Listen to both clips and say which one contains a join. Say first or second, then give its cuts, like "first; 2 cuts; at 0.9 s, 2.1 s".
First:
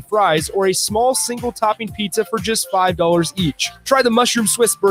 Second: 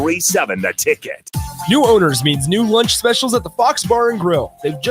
second; 1 cut; at 1.2 s